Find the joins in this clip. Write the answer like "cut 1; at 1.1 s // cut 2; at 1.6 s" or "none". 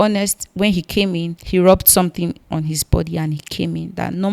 cut 1; at 1.3 s